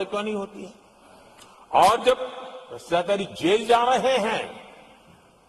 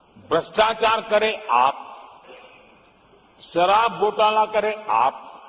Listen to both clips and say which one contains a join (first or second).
second